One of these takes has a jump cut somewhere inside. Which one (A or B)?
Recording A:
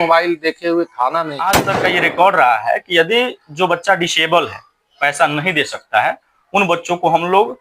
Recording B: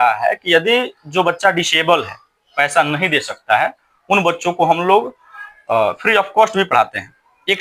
A